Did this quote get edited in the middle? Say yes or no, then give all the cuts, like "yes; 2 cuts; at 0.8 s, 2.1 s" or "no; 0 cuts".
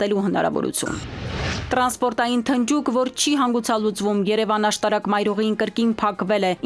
yes; 1 cut; at 1.5 s